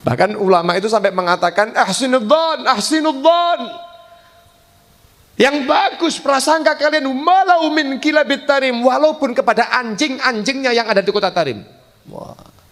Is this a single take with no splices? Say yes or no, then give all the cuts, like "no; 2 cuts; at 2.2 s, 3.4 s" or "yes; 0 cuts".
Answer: yes; 0 cuts